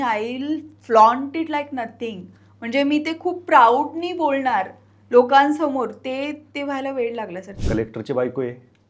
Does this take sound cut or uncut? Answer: cut